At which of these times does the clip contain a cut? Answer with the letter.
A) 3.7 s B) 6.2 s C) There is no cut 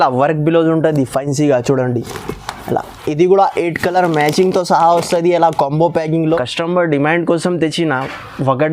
B